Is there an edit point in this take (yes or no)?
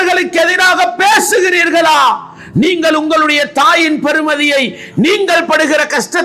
no